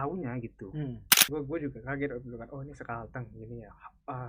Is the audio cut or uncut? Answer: cut